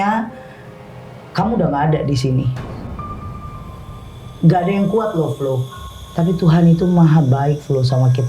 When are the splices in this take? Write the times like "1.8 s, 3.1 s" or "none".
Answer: 5.8 s